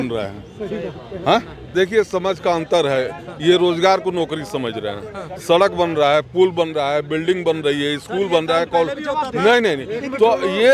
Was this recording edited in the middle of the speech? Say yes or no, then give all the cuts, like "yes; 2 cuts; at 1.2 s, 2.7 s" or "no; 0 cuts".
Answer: yes; 1 cut; at 1.6 s